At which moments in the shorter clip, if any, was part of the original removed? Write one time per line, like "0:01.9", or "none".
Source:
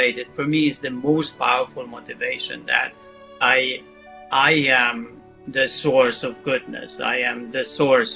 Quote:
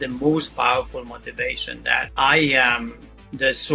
0:02.1